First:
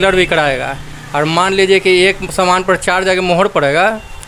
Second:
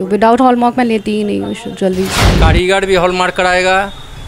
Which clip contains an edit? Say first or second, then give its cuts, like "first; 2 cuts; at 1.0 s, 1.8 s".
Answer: second; 1 cut; at 2.2 s